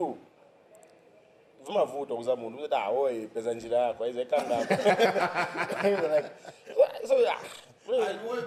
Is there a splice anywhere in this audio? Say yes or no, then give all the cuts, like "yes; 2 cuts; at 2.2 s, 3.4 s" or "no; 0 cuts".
no; 0 cuts